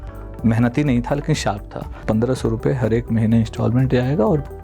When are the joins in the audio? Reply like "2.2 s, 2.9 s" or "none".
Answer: 2.0 s